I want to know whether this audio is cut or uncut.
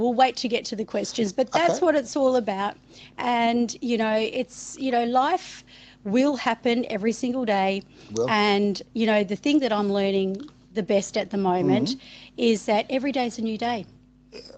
uncut